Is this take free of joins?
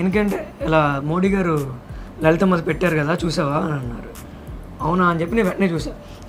yes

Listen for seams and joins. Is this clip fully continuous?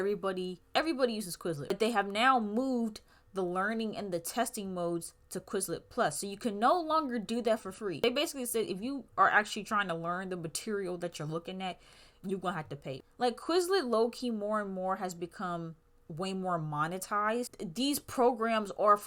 no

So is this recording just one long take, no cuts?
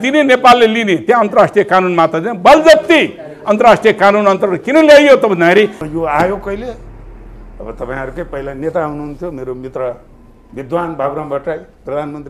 no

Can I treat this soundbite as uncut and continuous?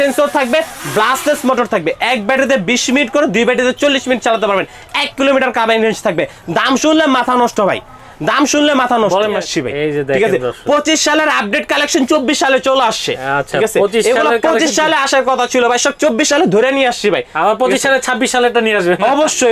no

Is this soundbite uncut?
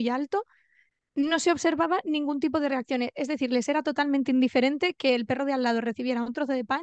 yes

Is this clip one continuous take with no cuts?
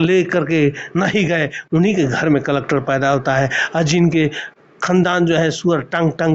yes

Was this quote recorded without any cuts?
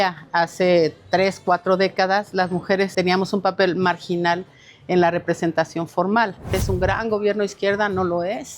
no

